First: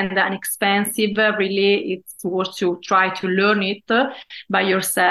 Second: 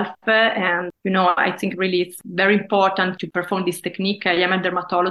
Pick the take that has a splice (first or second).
second